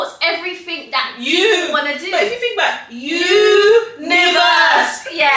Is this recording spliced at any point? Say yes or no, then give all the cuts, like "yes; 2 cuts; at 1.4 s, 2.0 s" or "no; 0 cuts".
no; 0 cuts